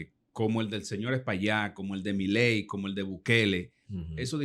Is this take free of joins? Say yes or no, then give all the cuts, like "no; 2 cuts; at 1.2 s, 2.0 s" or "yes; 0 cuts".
yes; 0 cuts